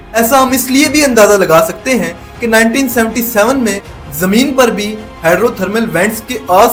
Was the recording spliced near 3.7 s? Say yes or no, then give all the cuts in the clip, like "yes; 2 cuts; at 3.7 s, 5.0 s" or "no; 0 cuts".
no; 0 cuts